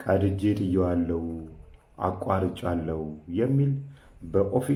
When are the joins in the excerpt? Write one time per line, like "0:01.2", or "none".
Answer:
none